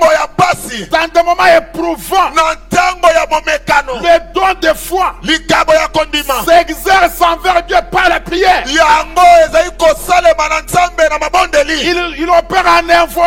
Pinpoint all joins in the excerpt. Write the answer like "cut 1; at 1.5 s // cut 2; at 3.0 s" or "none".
none